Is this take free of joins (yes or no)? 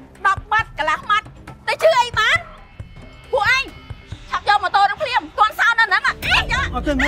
yes